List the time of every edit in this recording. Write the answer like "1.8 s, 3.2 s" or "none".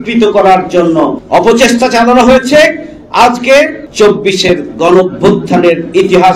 1.2 s, 3.8 s